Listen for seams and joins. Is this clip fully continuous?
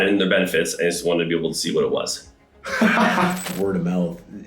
no; 1 cut; at 3.5 s

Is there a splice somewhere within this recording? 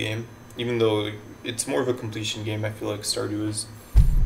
no; 0 cuts

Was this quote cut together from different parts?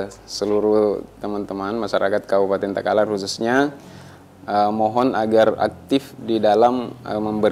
no; 0 cuts

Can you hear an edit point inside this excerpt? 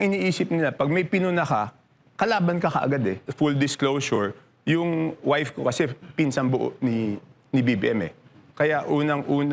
yes; 1 cut; at 3.2 s

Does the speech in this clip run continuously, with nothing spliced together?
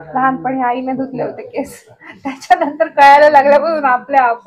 yes; 0 cuts

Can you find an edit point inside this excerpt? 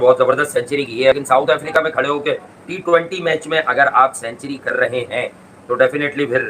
yes; 1 cut; at 1.2 s

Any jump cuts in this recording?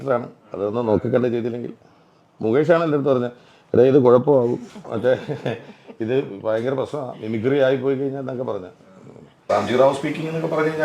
yes; 1 cut; at 9.4 s

